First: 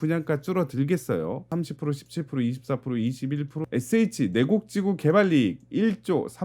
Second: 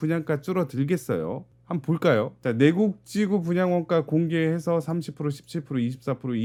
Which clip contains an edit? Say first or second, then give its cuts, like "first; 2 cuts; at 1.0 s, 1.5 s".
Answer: first; 2 cuts; at 1.5 s, 3.6 s